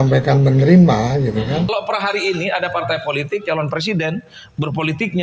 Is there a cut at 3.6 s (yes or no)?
no